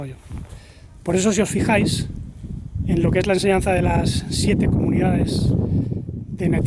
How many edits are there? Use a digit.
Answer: 0